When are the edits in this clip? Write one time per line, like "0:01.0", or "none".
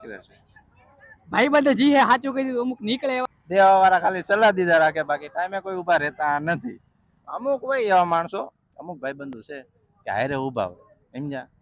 0:03.2